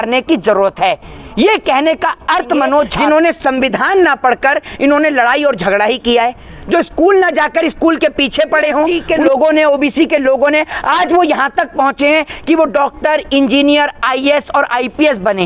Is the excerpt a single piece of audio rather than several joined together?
no; 2 cuts; at 3.0 s, 9.0 s

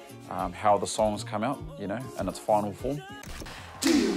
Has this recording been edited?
yes; 1 cut; at 3.1 s

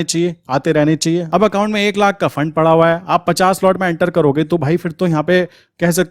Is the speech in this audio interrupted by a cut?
yes; 1 cut; at 1.2 s

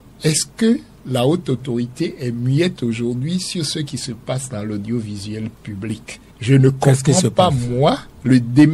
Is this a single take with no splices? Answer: no; 1 cut; at 0.9 s

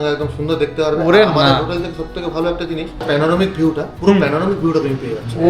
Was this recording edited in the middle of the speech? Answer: no; 0 cuts

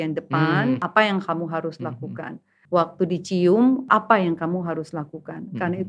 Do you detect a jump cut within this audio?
yes; 1 cut; at 3.8 s

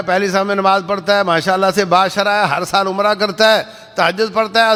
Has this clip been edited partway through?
no; 0 cuts

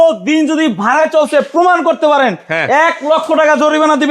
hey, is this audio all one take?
yes; 0 cuts

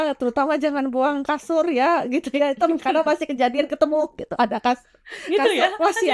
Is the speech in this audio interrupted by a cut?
no; 0 cuts

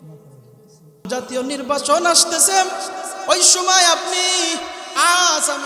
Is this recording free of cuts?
no; 1 cut; at 1.1 s

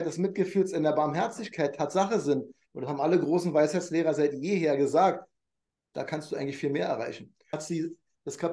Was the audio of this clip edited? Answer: yes; 1 cut; at 7.6 s

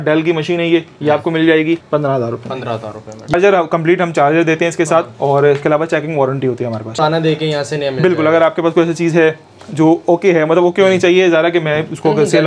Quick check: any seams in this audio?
yes; 3 cuts; at 1.8 s, 3.3 s, 7.0 s

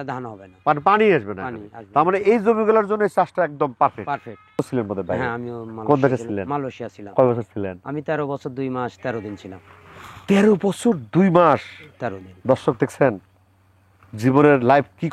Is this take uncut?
no; 1 cut; at 4.6 s

